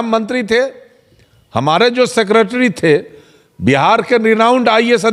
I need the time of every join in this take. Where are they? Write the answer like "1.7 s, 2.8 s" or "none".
none